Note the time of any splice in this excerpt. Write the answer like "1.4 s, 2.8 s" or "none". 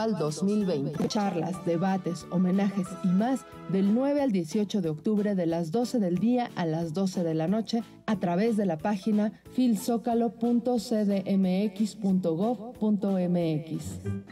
1.0 s